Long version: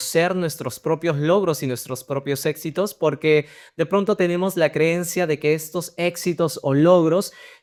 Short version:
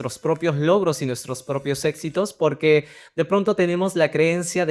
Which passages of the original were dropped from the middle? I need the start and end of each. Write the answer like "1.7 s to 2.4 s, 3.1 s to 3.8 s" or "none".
none